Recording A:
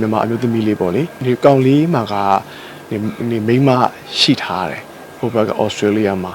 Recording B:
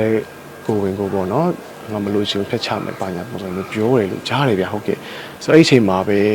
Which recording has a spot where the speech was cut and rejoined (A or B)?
A